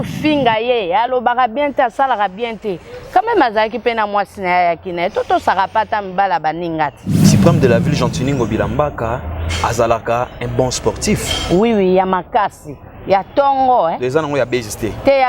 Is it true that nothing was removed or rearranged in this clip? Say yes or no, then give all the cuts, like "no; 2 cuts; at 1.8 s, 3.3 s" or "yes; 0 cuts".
no; 1 cut; at 7.2 s